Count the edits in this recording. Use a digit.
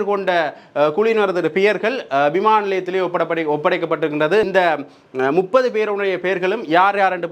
1